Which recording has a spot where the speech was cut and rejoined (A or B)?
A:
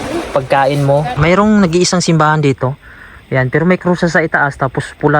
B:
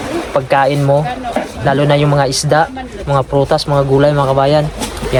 A